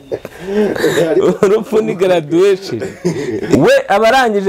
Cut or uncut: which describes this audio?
cut